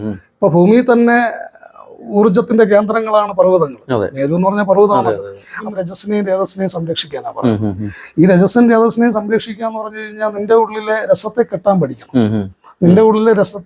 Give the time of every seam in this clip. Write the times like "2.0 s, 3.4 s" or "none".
5.5 s